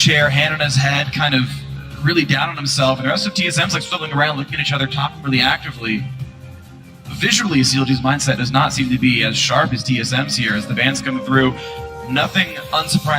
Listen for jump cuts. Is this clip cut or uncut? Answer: cut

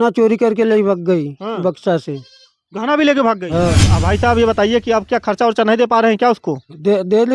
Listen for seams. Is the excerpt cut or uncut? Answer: cut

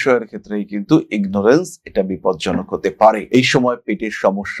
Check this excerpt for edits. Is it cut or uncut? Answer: uncut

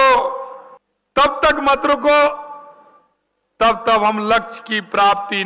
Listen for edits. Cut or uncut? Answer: uncut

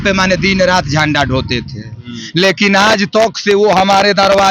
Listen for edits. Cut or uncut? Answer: uncut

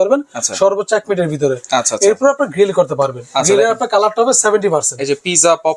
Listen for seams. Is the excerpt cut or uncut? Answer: uncut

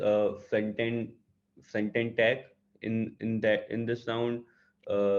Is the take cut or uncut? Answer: uncut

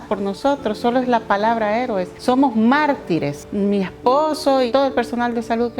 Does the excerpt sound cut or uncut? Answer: cut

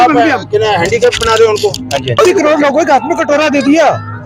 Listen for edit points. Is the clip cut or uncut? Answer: cut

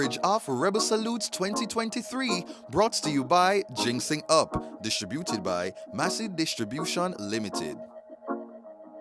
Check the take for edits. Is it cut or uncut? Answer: uncut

